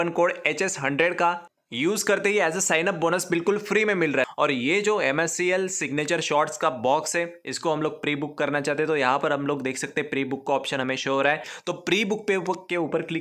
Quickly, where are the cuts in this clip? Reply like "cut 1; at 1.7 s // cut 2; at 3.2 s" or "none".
cut 1; at 4.3 s // cut 2; at 11.5 s